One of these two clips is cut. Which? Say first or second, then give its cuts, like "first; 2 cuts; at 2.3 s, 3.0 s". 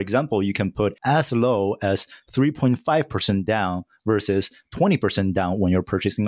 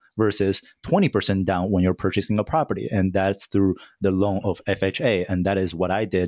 first; 1 cut; at 1.0 s